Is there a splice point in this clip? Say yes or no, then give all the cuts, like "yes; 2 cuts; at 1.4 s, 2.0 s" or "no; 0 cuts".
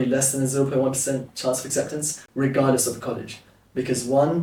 no; 0 cuts